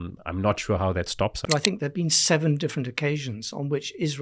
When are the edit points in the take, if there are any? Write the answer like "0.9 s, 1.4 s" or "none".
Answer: 1.4 s